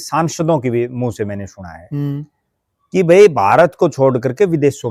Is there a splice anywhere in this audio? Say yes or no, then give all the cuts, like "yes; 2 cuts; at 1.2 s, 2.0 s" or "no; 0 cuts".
no; 0 cuts